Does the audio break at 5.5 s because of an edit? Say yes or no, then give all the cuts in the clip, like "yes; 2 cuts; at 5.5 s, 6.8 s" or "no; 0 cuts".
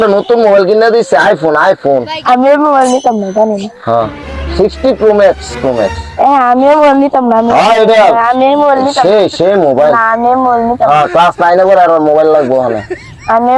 yes; 1 cut; at 5.5 s